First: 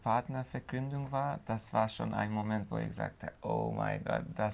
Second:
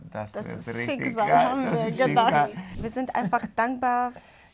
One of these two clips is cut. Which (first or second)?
second